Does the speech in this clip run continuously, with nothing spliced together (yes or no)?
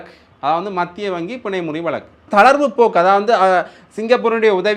no